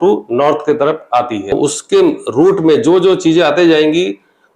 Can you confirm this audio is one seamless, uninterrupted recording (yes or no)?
no